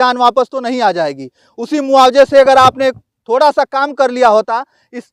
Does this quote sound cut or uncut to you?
uncut